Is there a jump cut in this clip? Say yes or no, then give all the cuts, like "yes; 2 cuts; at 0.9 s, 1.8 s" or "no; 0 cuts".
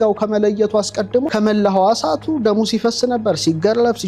yes; 1 cut; at 1.3 s